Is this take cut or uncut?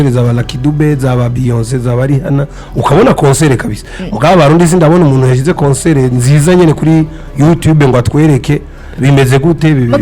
uncut